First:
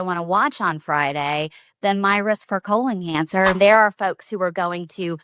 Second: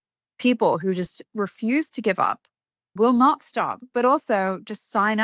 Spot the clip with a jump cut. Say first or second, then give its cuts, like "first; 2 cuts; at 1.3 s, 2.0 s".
first; 1 cut; at 3.6 s